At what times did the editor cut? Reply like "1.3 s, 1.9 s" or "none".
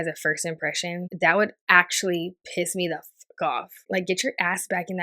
1.0 s